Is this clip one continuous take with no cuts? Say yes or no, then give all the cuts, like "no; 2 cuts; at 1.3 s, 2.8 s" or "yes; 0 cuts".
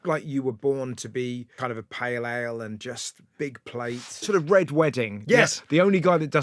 no; 2 cuts; at 1.5 s, 4.2 s